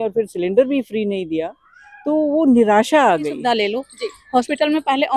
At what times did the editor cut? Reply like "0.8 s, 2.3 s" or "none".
3.3 s